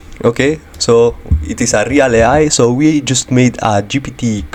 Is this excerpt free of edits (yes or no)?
yes